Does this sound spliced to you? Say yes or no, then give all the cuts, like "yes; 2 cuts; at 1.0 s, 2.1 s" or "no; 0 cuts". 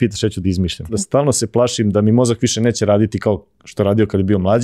yes; 1 cut; at 1.0 s